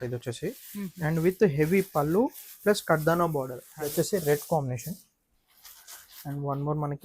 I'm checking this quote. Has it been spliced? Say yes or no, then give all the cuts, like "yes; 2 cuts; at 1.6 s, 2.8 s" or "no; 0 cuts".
yes; 1 cut; at 3.6 s